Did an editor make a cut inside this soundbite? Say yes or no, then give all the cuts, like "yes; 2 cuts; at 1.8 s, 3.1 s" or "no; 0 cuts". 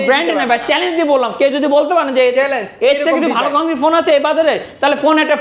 no; 0 cuts